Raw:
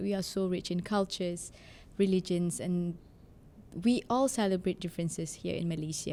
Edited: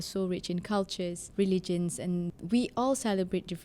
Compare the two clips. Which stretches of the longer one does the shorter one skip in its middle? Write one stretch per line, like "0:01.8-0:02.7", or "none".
0:01.4-0:01.8
0:03.0-0:03.7